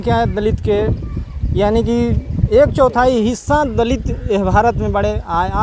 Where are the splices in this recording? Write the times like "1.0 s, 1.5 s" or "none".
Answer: none